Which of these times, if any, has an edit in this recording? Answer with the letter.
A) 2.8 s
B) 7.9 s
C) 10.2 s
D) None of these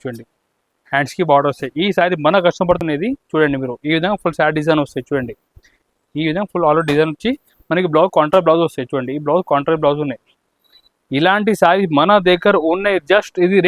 A